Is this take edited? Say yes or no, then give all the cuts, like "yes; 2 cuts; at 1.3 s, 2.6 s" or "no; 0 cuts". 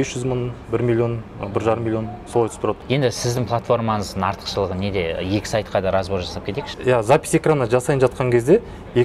yes; 2 cuts; at 2.8 s, 6.7 s